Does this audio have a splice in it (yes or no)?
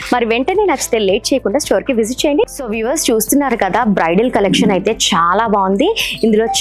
yes